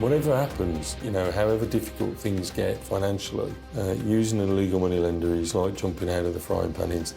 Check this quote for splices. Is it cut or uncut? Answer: uncut